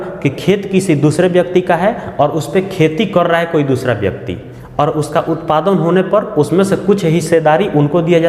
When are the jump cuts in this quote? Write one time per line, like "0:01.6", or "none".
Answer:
none